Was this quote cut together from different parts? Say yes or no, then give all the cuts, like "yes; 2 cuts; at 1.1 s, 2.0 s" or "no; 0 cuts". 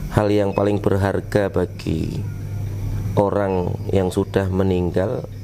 no; 0 cuts